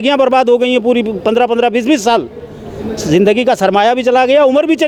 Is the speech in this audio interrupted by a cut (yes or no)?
no